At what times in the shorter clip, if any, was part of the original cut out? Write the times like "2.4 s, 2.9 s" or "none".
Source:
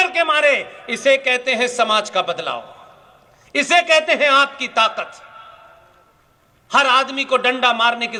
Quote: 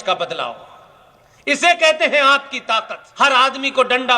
3.0 s